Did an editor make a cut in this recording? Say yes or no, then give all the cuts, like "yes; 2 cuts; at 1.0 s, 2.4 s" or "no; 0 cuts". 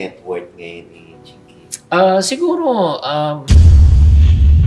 yes; 1 cut; at 3.5 s